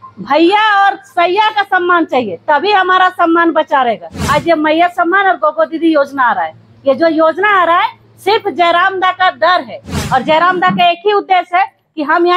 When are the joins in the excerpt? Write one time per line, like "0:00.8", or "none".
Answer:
0:04.2
0:09.9